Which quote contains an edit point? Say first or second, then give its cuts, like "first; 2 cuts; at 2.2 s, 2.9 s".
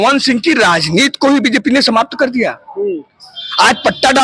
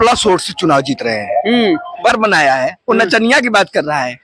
second; 1 cut; at 2.1 s